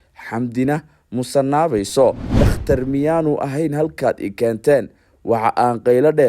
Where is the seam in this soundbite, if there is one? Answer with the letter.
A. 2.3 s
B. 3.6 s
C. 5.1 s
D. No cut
A